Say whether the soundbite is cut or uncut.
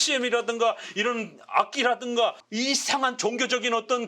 cut